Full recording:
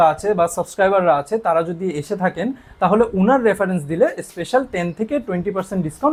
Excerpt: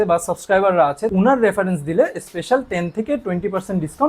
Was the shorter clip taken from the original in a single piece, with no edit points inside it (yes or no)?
no